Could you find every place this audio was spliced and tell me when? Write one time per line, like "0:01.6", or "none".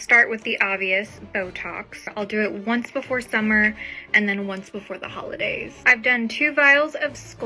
0:02.1
0:05.8